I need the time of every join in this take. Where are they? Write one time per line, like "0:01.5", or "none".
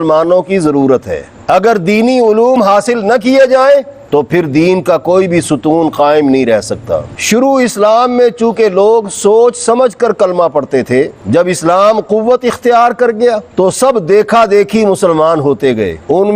0:01.3
0:07.1